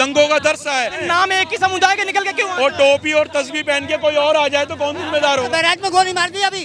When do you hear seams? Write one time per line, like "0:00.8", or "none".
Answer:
0:01.0
0:05.5